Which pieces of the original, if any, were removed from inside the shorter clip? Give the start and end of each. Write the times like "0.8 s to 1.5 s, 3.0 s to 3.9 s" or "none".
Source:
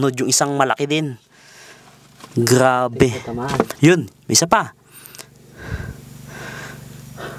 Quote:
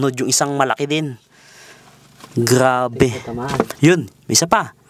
none

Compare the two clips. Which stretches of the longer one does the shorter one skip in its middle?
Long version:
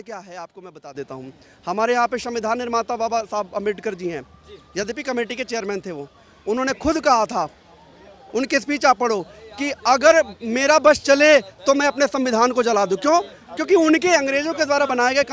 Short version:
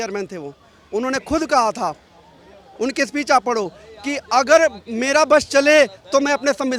none

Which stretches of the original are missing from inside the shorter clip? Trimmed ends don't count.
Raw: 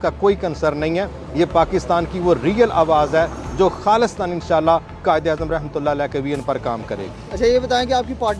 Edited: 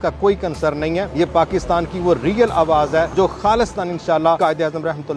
1.1 s to 1.3 s, 3.3 s to 3.5 s, 4.8 s to 5.0 s

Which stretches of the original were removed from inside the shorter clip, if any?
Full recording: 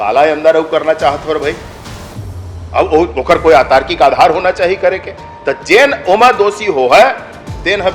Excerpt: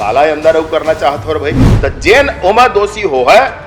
1.7 s to 5.3 s

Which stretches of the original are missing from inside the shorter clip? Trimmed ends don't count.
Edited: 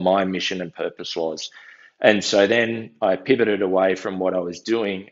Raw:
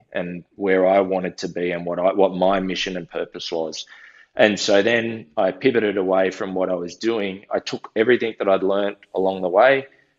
none

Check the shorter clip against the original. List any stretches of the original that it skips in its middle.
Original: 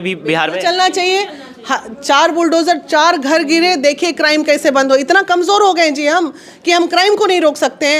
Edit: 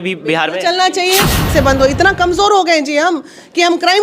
1.5 s to 4.6 s

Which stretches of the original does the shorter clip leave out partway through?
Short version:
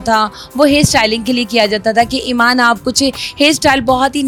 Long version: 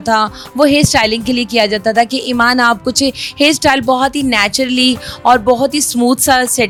none

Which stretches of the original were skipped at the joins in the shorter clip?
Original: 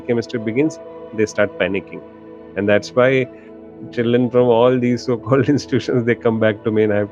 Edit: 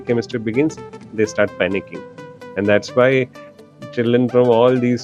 none

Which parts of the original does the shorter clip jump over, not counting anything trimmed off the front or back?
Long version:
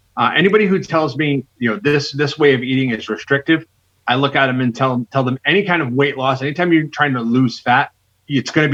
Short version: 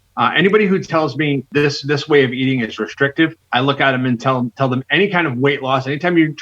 1.5 s to 1.8 s, 3.7 s to 4.0 s

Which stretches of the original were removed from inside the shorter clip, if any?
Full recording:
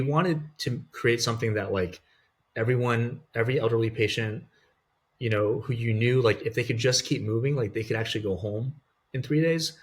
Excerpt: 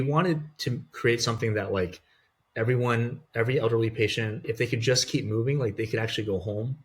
4.4 s to 6.4 s

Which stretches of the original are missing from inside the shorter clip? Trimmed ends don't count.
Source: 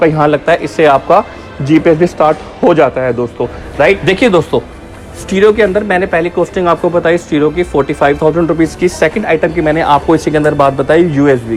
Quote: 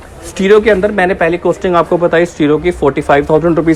none

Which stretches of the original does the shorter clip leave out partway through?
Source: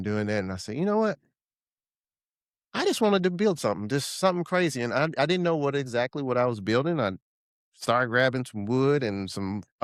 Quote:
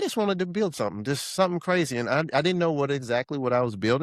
none

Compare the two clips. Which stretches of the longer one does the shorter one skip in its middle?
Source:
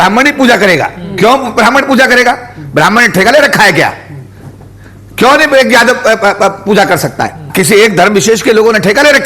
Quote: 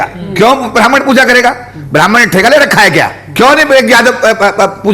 4.0 s to 5.0 s

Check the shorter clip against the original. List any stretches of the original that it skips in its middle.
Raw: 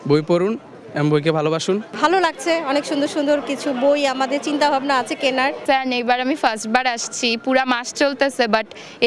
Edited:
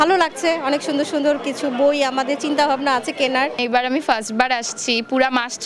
5.6 s to 5.9 s

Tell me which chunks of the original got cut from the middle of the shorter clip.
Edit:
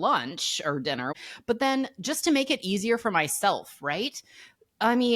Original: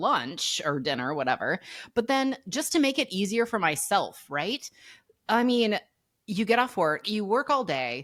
1.1 s to 1.6 s

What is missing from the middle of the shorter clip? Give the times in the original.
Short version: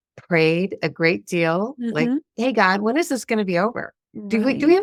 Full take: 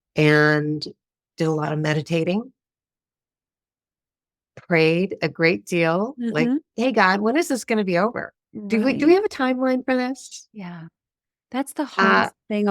none

